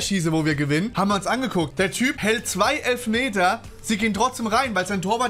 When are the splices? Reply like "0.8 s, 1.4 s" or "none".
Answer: 0.9 s, 2.0 s